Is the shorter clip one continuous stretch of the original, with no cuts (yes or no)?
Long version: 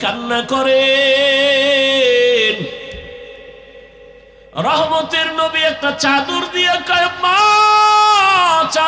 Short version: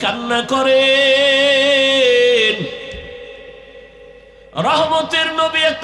yes